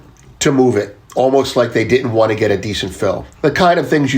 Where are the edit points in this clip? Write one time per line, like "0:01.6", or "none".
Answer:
0:01.0
0:03.3

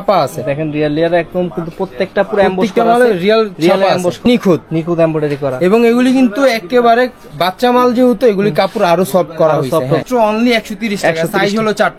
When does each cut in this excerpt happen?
0:04.3
0:10.0

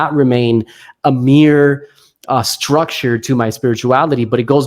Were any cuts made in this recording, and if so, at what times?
none

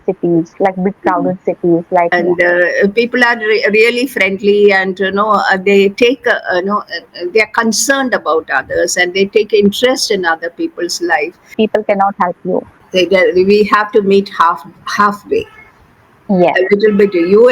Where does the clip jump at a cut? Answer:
0:02.1
0:11.5
0:12.8

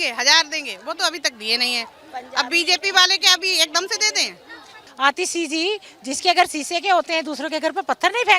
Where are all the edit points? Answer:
0:04.8

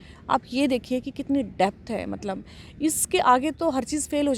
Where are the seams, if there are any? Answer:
none

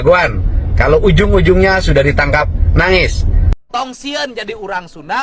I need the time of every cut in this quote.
none

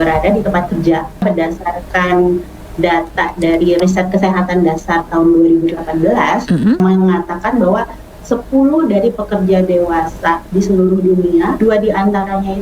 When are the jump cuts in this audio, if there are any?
0:01.2
0:03.8
0:06.8
0:11.5

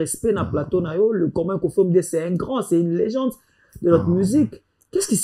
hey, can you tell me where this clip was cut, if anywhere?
none

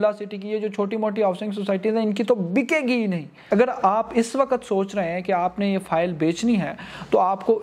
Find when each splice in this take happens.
0:03.4

